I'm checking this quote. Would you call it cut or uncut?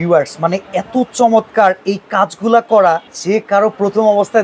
cut